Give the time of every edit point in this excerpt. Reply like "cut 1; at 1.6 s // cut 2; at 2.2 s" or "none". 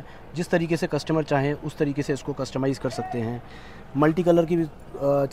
none